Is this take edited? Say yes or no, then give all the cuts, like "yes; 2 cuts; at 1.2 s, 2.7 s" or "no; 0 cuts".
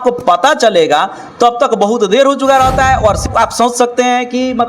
yes; 1 cut; at 3.2 s